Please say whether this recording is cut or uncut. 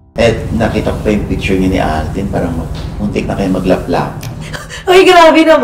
uncut